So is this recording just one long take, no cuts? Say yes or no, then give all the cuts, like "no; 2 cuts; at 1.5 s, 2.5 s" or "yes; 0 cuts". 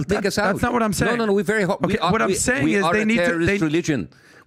yes; 0 cuts